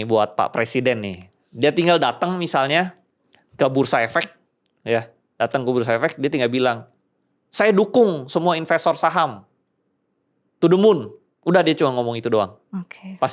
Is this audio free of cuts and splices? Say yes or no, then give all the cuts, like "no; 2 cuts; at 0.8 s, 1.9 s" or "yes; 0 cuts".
yes; 0 cuts